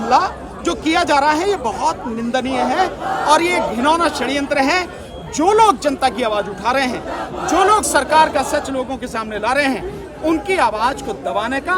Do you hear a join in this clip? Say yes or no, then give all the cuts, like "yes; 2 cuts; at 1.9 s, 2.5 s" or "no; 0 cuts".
no; 0 cuts